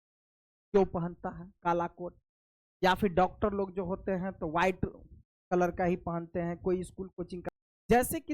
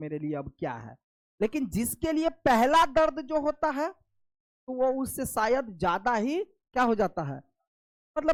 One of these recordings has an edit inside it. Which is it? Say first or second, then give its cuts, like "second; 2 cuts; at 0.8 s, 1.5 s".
first; 1 cut; at 7.4 s